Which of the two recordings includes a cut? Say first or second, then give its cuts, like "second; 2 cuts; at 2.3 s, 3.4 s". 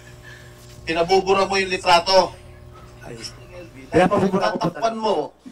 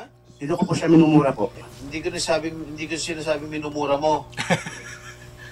first; 1 cut; at 4.6 s